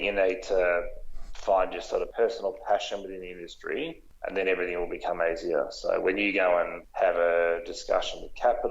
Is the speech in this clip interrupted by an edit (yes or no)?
yes